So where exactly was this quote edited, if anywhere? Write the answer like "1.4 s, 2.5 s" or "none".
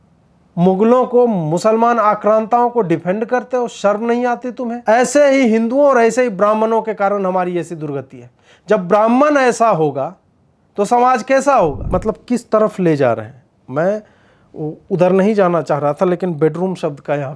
4.7 s, 11.8 s